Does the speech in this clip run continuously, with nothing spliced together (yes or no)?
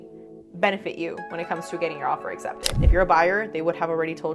no